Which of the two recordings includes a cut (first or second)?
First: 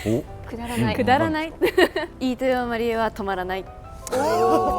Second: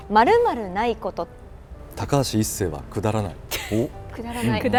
first